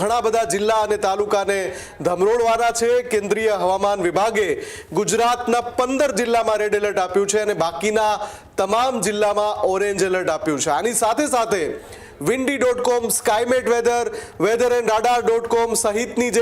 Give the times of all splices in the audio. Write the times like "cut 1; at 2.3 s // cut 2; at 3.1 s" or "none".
none